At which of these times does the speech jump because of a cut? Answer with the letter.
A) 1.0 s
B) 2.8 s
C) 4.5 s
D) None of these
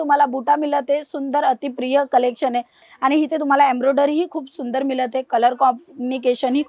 B